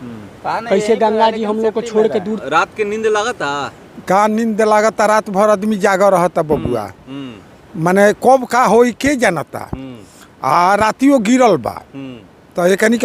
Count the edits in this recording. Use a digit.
1